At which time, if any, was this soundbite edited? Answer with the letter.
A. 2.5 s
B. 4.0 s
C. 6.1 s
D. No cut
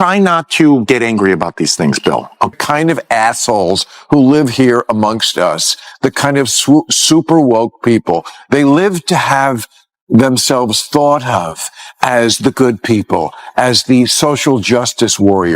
A